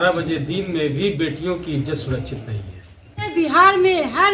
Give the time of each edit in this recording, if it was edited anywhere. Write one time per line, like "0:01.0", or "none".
0:03.3

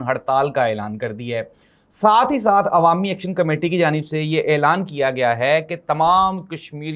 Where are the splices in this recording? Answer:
none

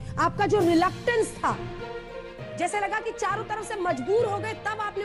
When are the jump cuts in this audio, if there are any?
none

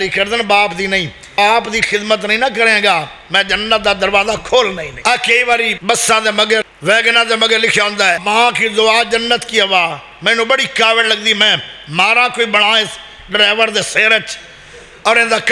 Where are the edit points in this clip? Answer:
0:01.3
0:04.9
0:05.8
0:06.6
0:08.2

